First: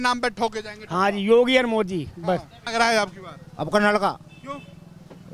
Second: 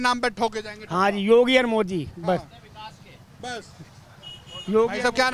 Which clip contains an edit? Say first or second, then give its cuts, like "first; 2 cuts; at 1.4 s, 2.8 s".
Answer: first; 1 cut; at 2.6 s